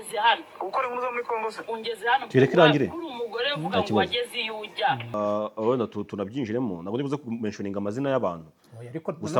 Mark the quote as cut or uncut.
cut